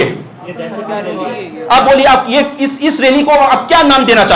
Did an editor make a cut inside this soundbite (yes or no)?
no